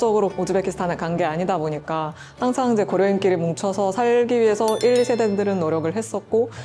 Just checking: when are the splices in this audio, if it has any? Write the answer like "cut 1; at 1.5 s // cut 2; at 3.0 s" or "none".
none